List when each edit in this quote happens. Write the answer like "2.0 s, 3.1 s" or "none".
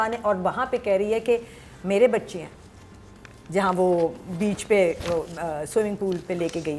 none